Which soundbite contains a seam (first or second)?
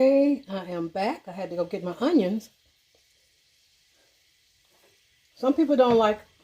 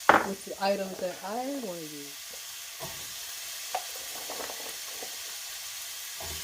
second